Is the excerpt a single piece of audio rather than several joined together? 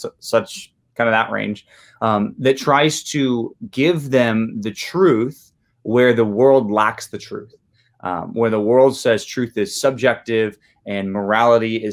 yes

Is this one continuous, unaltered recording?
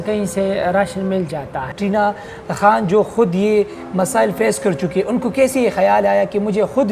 no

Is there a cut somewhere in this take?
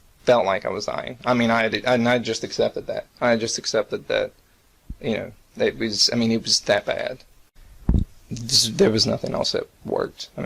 yes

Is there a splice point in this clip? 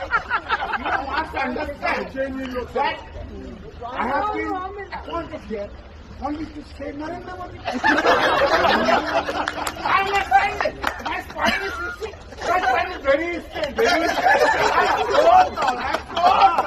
no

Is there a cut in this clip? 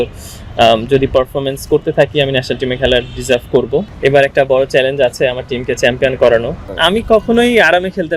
yes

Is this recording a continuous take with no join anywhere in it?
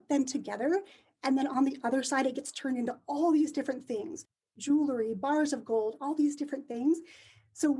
yes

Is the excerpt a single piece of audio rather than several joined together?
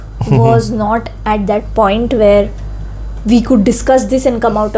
yes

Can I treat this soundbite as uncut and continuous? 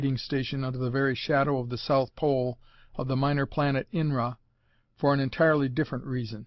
yes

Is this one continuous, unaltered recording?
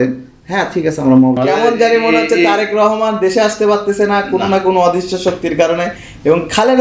no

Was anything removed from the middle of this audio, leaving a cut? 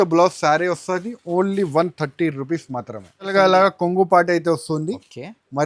yes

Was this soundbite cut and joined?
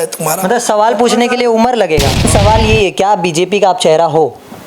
yes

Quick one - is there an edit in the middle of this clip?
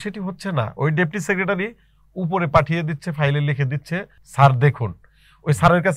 yes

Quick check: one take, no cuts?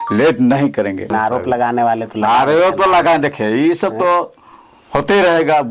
no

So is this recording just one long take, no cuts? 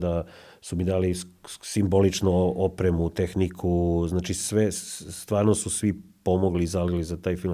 yes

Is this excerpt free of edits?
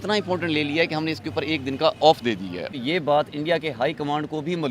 no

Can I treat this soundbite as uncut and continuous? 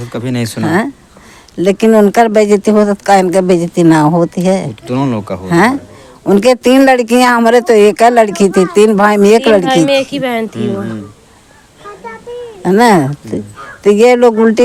yes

